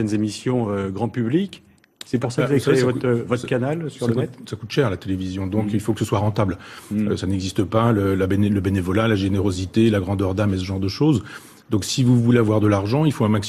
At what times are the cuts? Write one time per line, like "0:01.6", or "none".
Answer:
0:03.6